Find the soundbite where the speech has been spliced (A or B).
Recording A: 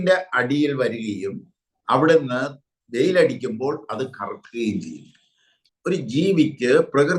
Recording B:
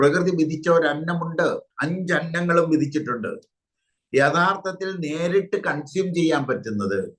A